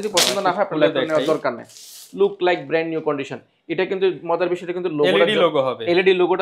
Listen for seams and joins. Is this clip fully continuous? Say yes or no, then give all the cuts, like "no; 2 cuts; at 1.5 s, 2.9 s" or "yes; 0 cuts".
yes; 0 cuts